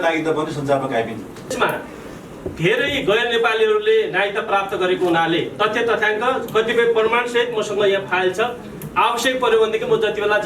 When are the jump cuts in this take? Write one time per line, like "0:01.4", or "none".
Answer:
0:01.5

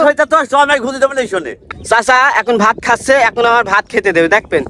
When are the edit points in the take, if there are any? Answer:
0:01.6

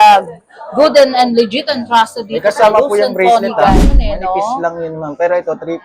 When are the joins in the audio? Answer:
0:03.9

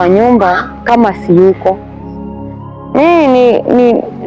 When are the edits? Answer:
none

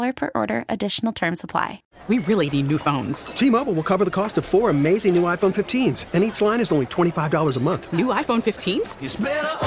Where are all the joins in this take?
0:01.9

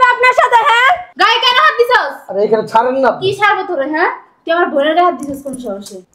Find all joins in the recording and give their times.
0:01.1

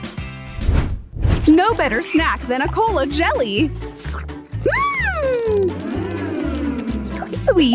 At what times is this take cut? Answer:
0:01.1

